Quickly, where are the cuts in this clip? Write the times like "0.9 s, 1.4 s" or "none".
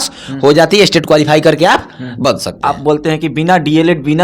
2.4 s